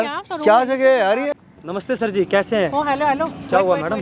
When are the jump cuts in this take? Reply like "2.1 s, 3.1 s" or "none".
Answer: 1.4 s